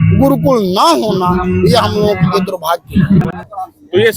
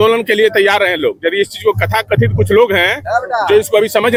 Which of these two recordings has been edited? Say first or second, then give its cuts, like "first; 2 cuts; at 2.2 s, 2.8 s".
first; 1 cut; at 3.2 s